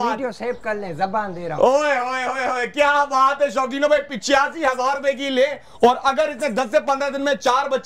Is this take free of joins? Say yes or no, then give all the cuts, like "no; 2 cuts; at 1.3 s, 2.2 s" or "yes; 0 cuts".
yes; 0 cuts